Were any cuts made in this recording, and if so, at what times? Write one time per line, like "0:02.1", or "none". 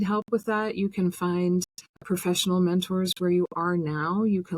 0:02.0